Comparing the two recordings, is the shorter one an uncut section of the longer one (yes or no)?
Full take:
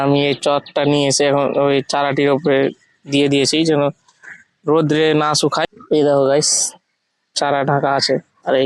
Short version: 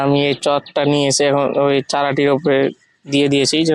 yes